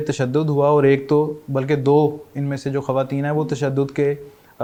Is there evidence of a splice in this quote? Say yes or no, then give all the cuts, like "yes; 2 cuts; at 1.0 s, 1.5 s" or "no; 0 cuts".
no; 0 cuts